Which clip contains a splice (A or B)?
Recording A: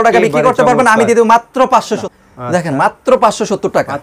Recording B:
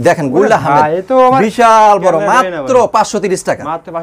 A